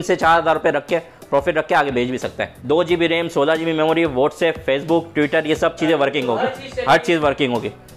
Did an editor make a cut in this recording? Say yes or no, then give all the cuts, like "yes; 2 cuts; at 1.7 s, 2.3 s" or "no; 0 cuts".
yes; 1 cut; at 2.5 s